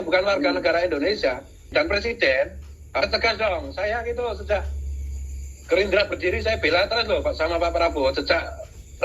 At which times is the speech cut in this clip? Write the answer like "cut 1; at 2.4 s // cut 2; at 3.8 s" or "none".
cut 1; at 1.7 s